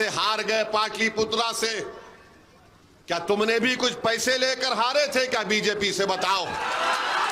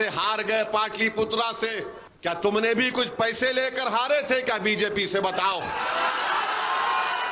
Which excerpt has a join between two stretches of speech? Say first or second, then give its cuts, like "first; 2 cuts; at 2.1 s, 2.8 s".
second; 1 cut; at 2.0 s